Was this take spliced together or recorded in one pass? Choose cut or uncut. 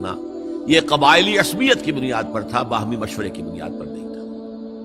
cut